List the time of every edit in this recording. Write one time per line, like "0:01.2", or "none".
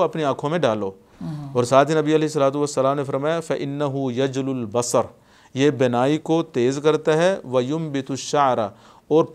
none